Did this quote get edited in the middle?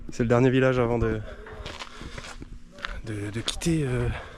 no; 0 cuts

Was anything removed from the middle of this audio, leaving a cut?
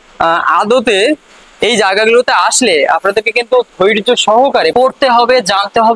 yes; 1 cut; at 4.7 s

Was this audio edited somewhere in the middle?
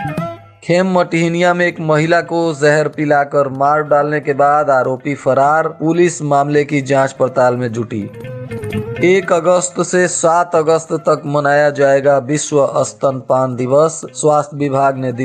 no; 0 cuts

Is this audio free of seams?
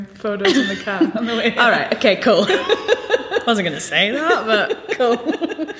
yes; 0 cuts

